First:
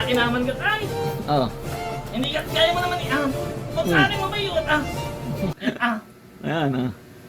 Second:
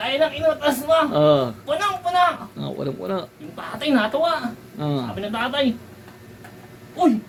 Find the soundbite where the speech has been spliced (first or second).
first